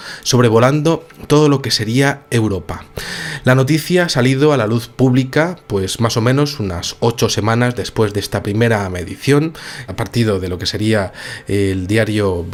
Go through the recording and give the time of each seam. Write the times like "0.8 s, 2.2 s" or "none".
none